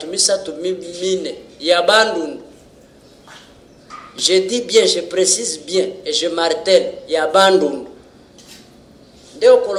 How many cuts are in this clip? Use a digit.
0